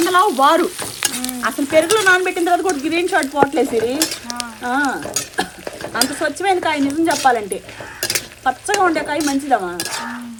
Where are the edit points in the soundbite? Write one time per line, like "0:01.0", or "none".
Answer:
none

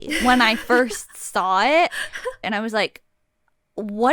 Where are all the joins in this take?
0:02.4

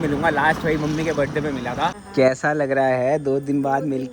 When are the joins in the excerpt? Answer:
0:02.0

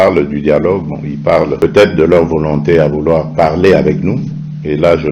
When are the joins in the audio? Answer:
0:01.5

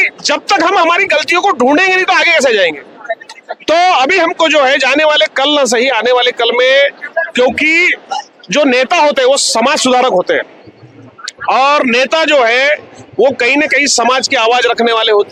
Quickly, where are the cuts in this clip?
none

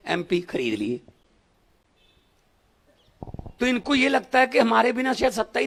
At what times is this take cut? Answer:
none

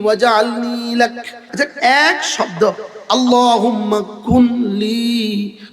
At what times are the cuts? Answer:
0:01.4

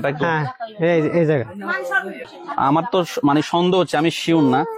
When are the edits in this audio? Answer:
0:02.4

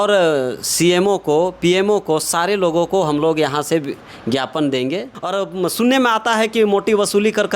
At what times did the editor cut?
0:05.1

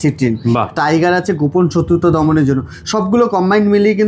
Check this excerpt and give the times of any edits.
none

